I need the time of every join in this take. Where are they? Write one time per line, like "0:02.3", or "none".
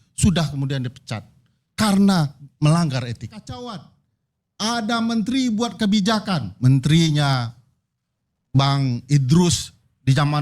0:03.4

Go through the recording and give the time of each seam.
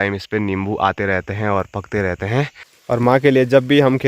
0:02.7

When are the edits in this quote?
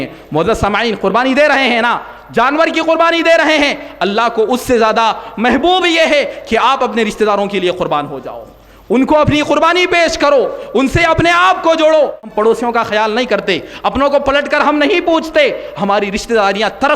0:12.2

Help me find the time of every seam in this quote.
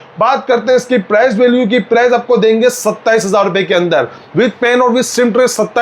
none

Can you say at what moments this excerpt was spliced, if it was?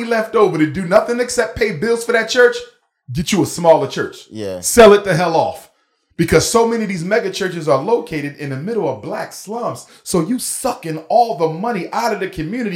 none

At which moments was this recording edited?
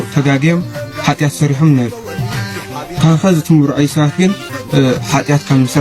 0:04.5

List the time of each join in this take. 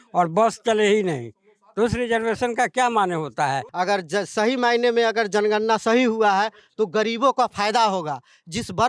0:03.7

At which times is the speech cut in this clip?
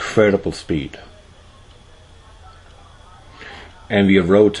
0:03.3

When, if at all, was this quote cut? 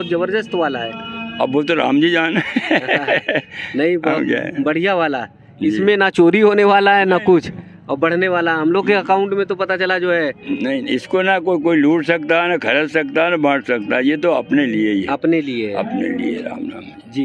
none

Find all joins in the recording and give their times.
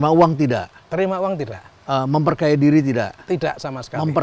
none

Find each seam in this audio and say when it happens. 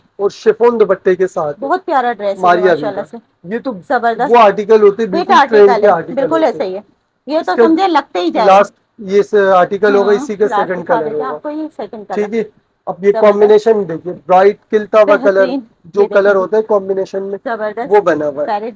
none

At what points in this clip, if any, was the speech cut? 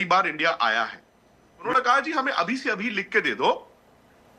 0:01.6

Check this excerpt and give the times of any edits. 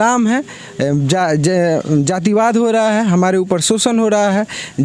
none

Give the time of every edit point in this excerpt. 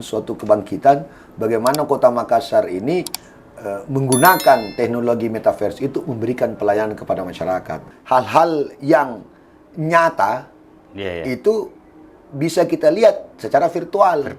0:07.8

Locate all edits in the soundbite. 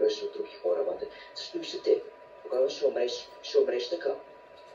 none

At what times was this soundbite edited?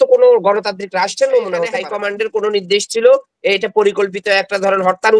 0:01.9

